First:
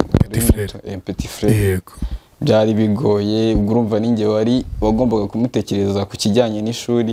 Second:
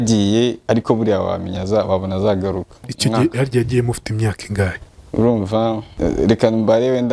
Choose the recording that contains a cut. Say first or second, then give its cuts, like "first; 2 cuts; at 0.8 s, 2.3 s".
second; 2 cuts; at 2.9 s, 5.9 s